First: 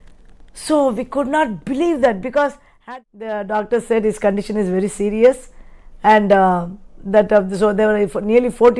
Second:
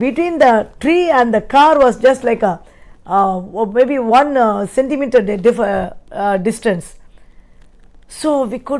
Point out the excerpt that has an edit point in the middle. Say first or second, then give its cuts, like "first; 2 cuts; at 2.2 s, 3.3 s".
first; 1 cut; at 2.7 s